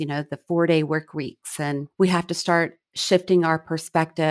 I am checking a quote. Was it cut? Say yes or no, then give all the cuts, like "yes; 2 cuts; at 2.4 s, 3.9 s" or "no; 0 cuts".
yes; 1 cut; at 1.8 s